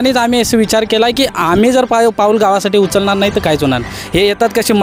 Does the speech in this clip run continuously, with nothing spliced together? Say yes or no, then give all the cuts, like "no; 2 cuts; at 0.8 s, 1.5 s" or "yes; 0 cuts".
yes; 0 cuts